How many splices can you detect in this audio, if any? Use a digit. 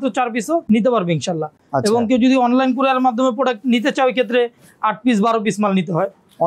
0